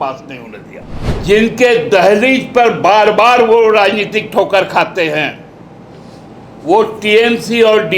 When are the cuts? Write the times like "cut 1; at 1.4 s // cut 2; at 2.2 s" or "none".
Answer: cut 1; at 1.1 s